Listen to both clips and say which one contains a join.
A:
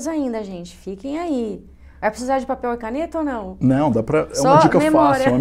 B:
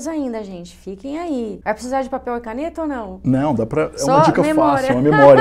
B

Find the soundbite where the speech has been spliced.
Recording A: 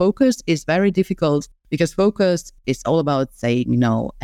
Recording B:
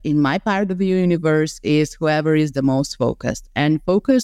A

